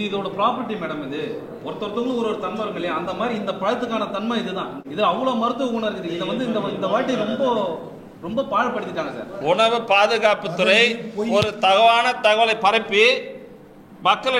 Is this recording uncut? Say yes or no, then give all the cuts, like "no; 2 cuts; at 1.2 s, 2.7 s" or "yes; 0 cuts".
no; 2 cuts; at 4.7 s, 9.3 s